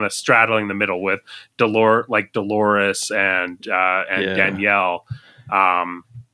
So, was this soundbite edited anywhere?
no; 0 cuts

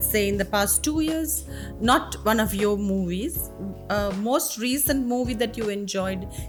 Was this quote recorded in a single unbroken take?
yes; 0 cuts

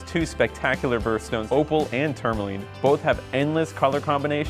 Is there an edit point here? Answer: yes; 1 cut; at 1.4 s

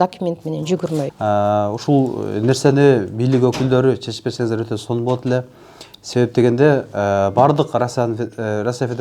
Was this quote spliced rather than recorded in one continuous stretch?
yes; 1 cut; at 1.1 s

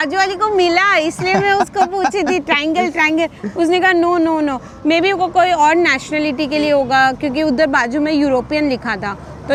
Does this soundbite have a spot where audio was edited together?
no; 0 cuts

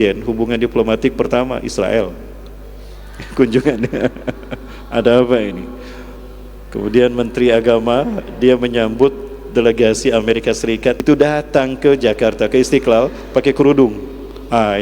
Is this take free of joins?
no; 1 cut; at 11.0 s

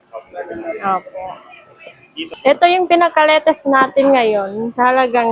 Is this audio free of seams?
no; 1 cut; at 2.3 s

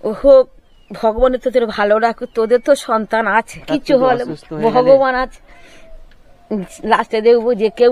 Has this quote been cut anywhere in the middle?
yes; 1 cut; at 3.6 s

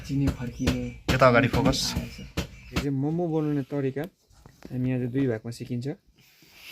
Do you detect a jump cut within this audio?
yes; 1 cut; at 2.8 s

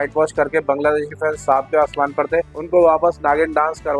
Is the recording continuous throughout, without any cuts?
yes; 0 cuts

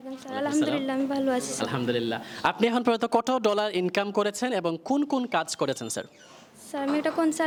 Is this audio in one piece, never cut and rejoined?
yes; 0 cuts

